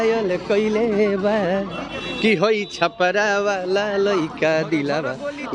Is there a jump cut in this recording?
no; 0 cuts

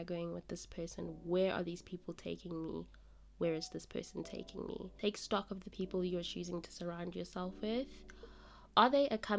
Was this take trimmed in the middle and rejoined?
yes; 1 cut; at 4.9 s

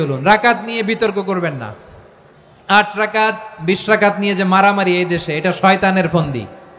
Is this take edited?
no; 0 cuts

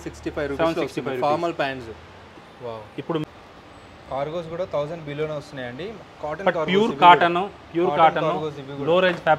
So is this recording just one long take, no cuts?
no; 1 cut; at 3.2 s

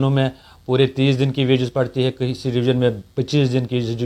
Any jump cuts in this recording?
no; 0 cuts

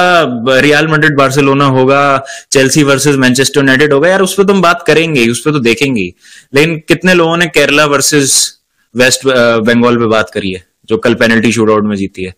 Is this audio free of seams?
yes; 0 cuts

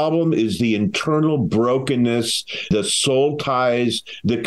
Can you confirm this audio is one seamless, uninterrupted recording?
no; 1 cut; at 2.7 s

